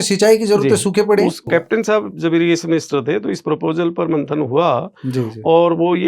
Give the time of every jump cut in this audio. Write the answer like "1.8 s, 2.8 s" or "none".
1.5 s